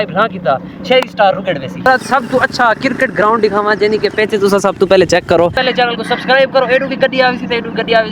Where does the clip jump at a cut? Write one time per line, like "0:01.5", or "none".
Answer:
0:01.9
0:05.6